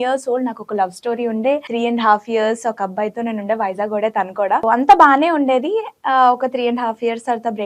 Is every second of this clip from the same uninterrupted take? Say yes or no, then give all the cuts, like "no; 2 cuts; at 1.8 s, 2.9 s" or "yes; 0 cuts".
no; 2 cuts; at 1.7 s, 4.6 s